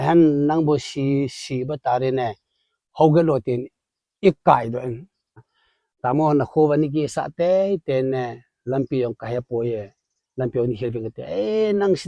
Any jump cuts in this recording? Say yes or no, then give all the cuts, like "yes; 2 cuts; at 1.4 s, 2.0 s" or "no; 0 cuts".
yes; 1 cut; at 5.4 s